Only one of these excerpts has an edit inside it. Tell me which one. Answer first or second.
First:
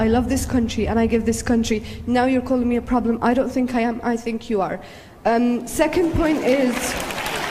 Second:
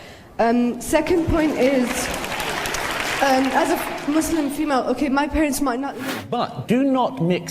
second